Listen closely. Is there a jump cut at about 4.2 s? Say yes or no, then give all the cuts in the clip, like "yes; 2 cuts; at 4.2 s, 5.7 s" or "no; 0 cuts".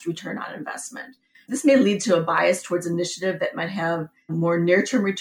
no; 1 cut; at 1.3 s